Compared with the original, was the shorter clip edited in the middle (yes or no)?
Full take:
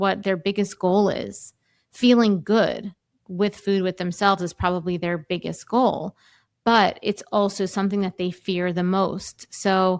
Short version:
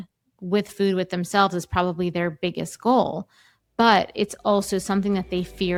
no